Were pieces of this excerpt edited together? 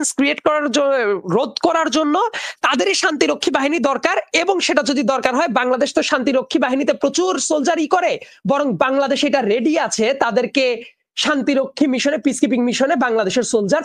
no; 0 cuts

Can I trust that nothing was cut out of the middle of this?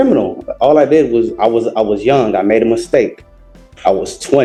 yes; 0 cuts

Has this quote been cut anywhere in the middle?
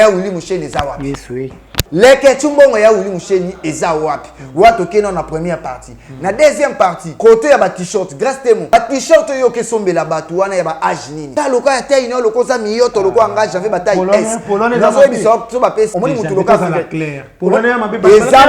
yes; 5 cuts; at 1.7 s, 7.1 s, 8.7 s, 11.2 s, 15.9 s

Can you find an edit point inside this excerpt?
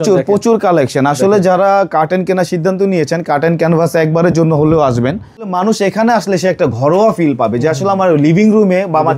yes; 1 cut; at 5.5 s

